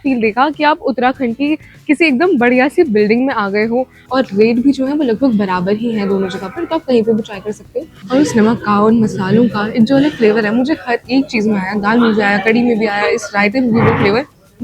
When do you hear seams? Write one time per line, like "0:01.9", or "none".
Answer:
0:04.0
0:08.0

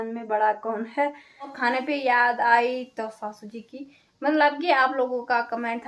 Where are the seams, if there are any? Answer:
0:01.6

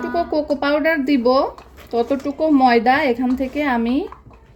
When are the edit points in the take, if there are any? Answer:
none

